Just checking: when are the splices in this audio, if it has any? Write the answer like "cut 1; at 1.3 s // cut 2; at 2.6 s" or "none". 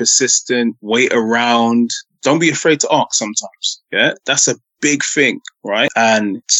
none

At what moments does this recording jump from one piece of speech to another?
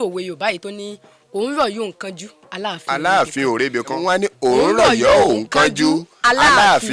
cut 1; at 4.0 s

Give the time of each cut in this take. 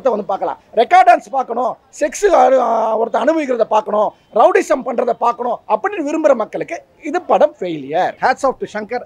cut 1; at 8.1 s

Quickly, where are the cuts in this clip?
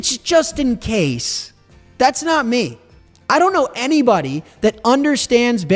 none

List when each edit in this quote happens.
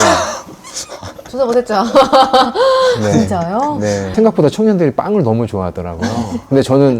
cut 1; at 4.1 s

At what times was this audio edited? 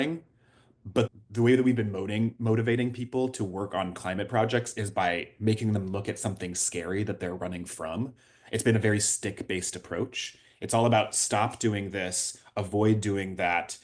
cut 1; at 1.1 s

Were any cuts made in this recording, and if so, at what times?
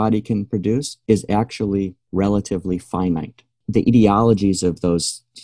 cut 1; at 2.0 s // cut 2; at 3.6 s

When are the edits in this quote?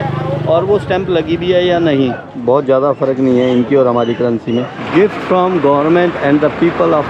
cut 1; at 2.3 s // cut 2; at 4.8 s

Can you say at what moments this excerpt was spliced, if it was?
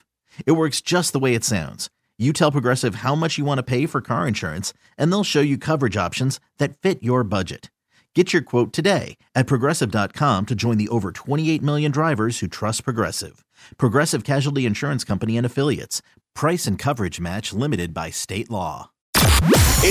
cut 1; at 19.0 s

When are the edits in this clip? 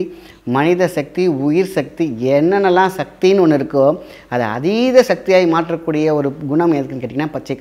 none

